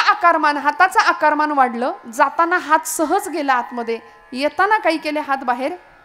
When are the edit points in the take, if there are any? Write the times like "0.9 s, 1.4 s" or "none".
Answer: none